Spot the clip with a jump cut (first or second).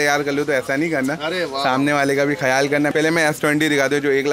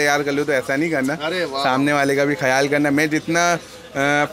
first